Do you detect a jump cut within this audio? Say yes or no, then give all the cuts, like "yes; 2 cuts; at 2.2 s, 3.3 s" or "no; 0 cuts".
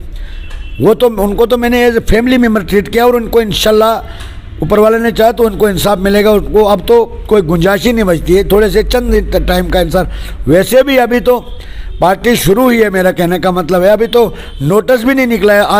no; 0 cuts